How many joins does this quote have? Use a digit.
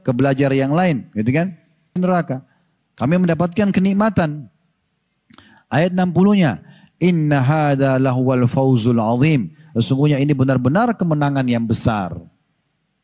1